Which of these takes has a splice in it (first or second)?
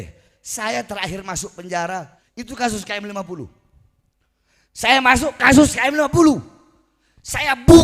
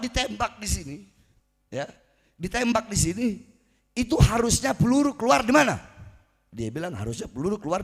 first